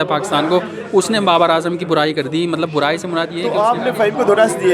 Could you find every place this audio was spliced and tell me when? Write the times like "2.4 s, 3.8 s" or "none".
3.4 s